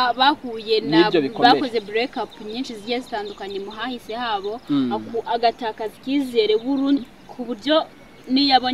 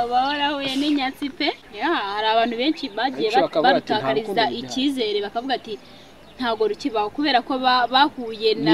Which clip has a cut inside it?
second; 1 cut; at 1.6 s

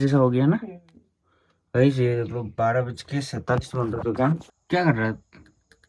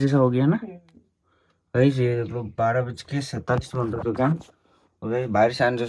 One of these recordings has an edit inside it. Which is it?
first; 1 cut; at 4.6 s

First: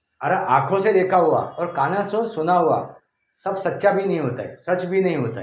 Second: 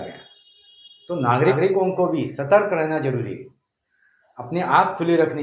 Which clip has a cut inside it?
second; 1 cut; at 1.5 s

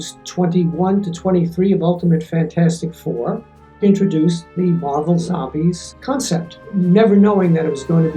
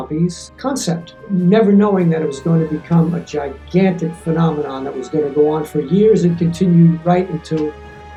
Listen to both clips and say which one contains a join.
first; 1 cut; at 3.8 s

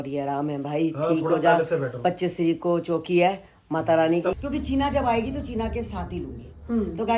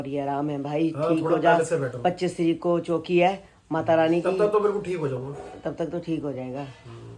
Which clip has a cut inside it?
first; 1 cut; at 4.3 s

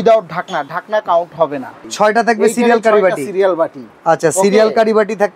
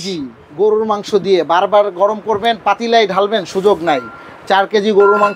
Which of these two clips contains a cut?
first; 1 cut; at 1.8 s

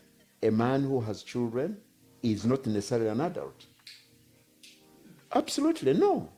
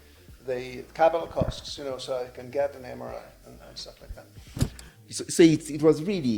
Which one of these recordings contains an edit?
second; 1 cut; at 4.8 s

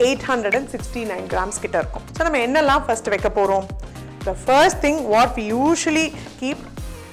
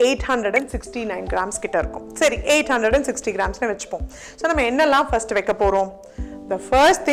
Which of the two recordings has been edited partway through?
first; 1 cut; at 2.0 s

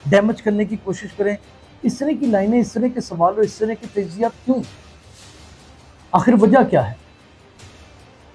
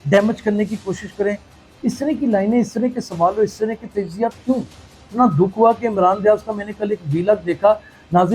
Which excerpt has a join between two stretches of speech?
second; 1 cut; at 5.1 s

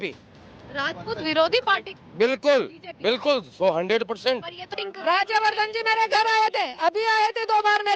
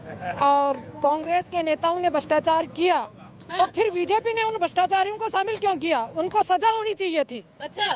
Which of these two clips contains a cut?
first; 1 cut; at 4.8 s

